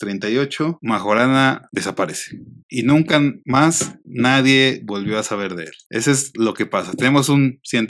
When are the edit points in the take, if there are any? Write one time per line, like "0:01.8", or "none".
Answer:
none